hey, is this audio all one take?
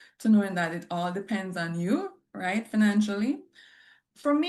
yes; 0 cuts

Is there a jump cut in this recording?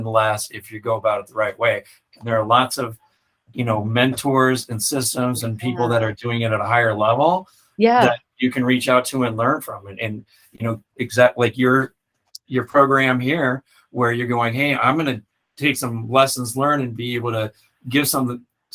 no; 0 cuts

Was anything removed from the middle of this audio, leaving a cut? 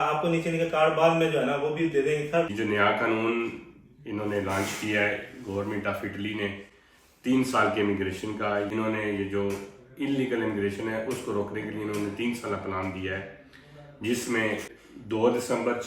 yes; 3 cuts; at 2.5 s, 8.7 s, 14.7 s

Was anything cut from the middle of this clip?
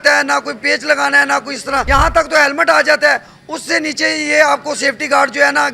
yes; 1 cut; at 1.9 s

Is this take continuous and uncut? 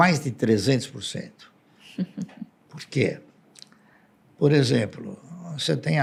yes; 0 cuts

